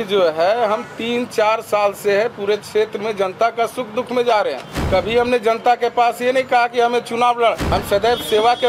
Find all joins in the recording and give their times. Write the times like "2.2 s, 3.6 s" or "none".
4.7 s, 7.6 s